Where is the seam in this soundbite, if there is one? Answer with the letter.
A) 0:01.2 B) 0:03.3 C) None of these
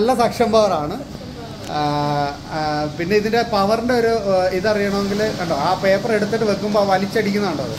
C